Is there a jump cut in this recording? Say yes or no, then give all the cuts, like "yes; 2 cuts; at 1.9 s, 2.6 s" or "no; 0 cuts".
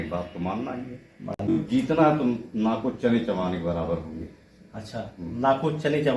yes; 1 cut; at 1.5 s